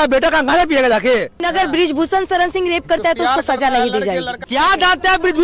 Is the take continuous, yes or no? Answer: no